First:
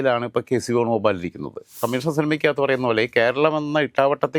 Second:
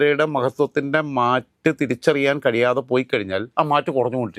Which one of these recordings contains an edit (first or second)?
first